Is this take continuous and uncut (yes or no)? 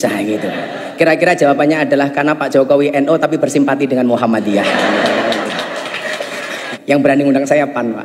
no